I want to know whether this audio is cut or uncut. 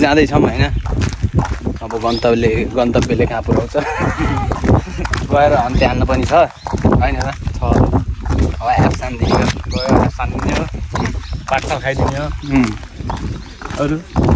uncut